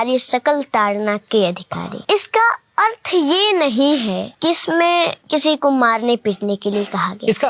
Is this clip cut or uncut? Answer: cut